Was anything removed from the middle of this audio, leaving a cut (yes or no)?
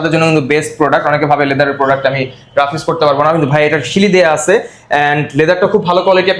no